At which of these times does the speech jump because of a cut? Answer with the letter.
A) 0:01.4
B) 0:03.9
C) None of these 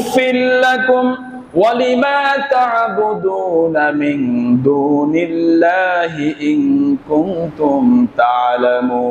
C